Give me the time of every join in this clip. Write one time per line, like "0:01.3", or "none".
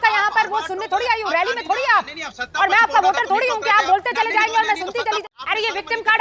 0:05.2

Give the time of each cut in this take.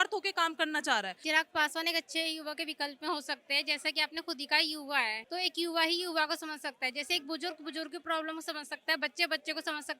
0:01.2
0:05.2

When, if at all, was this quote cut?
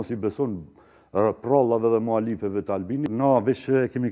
0:03.1

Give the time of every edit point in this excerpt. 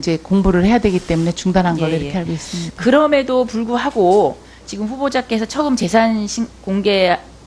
0:06.2

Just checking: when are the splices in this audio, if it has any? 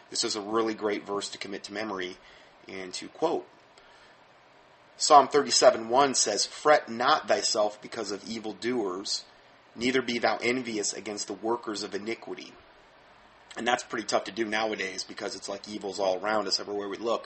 0:06.2

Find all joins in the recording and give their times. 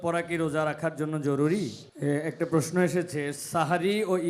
0:01.8

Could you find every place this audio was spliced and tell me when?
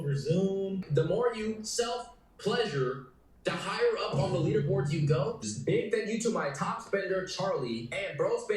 0:00.9
0:05.5

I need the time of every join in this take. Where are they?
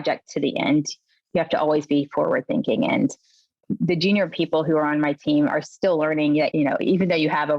0:03.6
0:06.5

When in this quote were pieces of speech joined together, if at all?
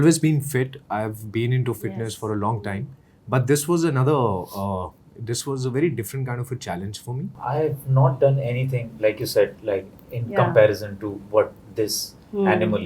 0:07.3

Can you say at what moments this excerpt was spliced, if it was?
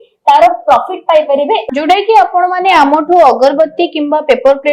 0:01.6

